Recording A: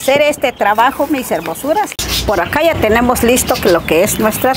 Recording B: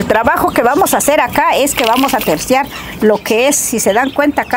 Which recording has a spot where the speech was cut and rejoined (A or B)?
A